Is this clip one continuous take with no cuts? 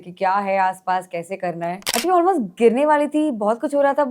no; 1 cut; at 1.8 s

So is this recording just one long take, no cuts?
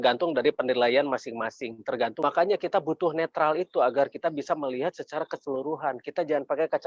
no; 1 cut; at 2.2 s

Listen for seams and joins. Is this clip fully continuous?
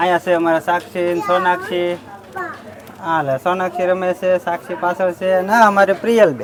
yes; 0 cuts

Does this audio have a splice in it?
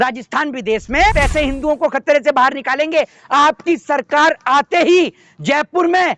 yes; 1 cut; at 1.1 s

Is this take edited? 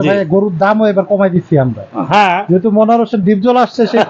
no; 0 cuts

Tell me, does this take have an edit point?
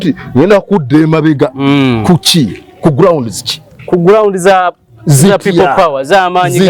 no; 0 cuts

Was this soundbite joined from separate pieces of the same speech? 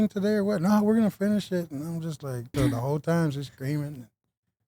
yes; 1 cut; at 2.5 s

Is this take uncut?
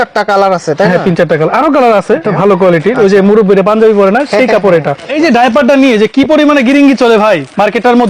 no; 2 cuts; at 2.2 s, 5.1 s

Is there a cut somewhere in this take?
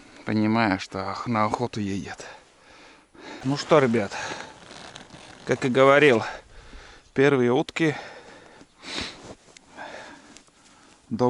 yes; 1 cut; at 3.3 s

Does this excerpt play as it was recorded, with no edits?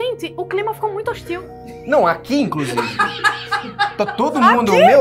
yes; 0 cuts

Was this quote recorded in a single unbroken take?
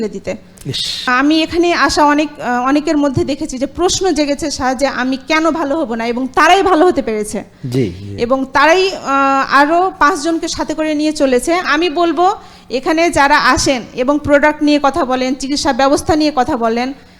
no; 2 cuts; at 1.0 s, 11.7 s

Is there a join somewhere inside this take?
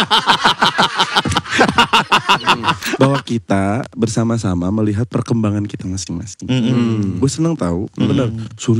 yes; 1 cut; at 2.9 s

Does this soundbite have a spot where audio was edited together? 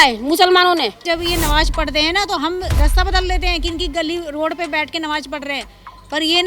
yes; 1 cut; at 1.0 s

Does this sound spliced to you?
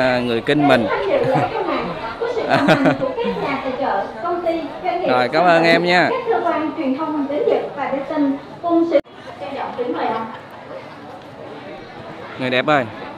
no; 0 cuts

